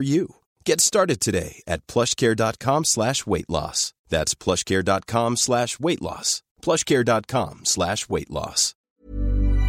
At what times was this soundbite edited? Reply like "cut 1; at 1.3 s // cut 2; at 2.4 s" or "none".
cut 1; at 8.7 s